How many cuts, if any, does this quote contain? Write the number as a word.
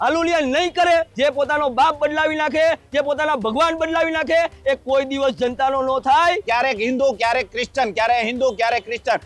two